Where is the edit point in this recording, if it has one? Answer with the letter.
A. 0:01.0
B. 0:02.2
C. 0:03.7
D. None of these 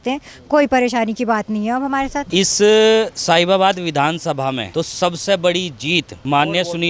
B